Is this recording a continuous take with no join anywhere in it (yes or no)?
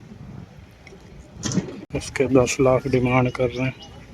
no